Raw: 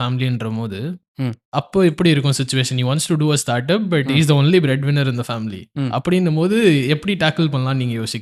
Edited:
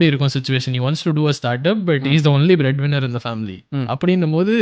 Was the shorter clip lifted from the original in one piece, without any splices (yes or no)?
yes